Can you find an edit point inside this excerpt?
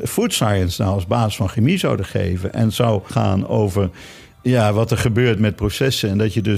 yes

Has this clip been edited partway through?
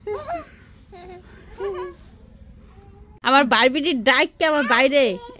yes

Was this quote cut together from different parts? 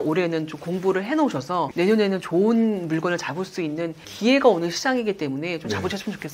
yes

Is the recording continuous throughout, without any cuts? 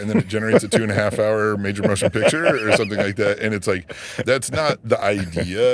yes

